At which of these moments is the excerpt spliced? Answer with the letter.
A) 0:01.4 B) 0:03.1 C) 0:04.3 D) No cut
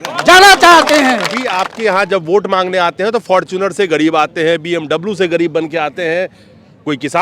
A